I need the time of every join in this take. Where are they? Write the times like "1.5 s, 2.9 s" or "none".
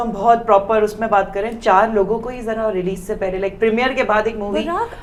none